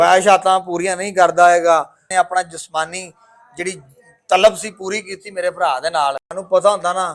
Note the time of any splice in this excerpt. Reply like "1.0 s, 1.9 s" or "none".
2.0 s, 6.3 s

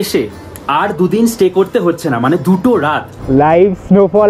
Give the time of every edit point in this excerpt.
3.1 s

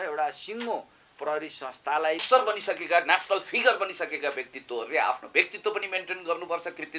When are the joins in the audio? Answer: 2.2 s

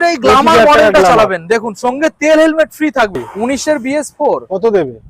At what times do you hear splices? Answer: 3.2 s

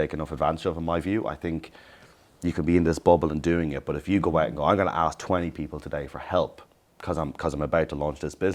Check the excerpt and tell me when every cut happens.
none

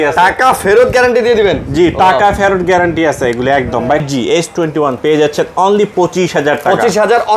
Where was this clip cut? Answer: 4.0 s

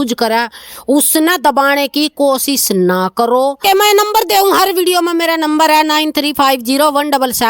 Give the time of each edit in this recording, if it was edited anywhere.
3.6 s

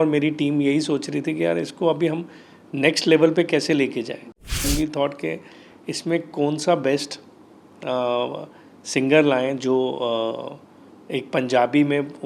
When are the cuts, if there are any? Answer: 4.7 s

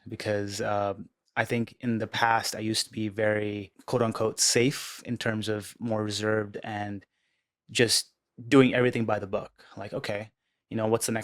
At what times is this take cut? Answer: 3.7 s

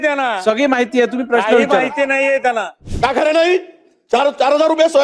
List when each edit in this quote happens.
2.8 s

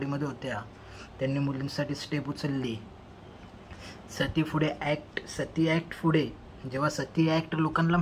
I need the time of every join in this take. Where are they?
none

